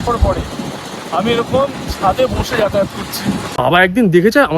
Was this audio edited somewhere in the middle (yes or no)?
yes